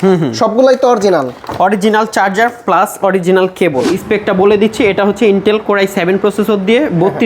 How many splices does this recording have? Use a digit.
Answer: 1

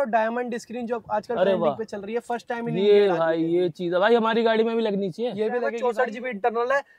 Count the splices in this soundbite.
1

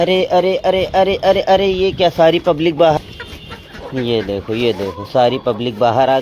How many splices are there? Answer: 1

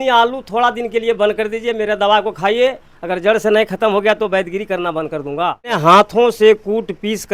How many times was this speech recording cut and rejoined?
1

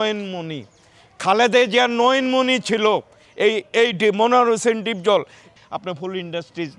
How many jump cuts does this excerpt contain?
1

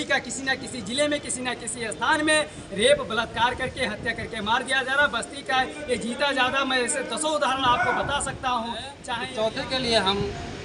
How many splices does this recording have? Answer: 1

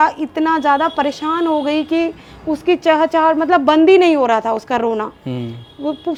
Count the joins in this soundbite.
0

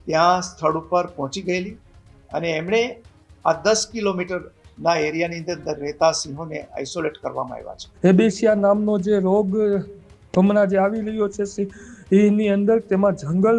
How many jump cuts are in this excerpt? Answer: 1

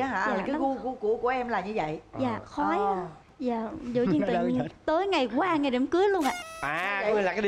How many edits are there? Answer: 1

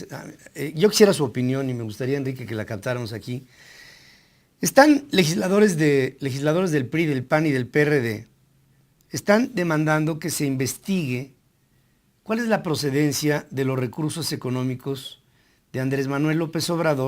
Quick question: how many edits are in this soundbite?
1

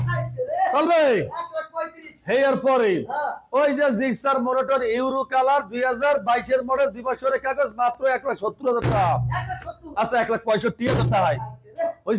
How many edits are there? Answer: 0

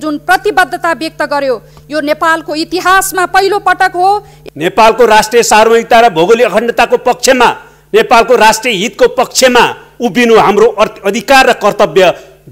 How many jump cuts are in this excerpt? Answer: 1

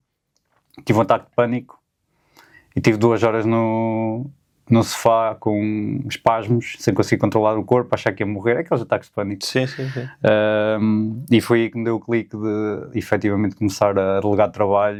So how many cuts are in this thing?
0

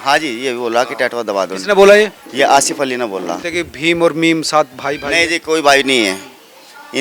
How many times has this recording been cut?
1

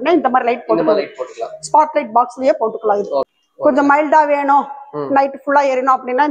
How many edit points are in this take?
1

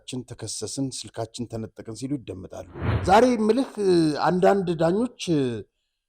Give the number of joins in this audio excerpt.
1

